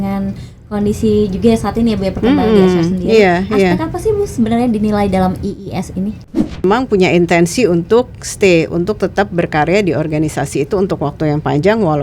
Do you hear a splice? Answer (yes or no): yes